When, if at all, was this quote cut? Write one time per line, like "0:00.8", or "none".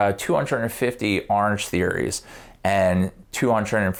none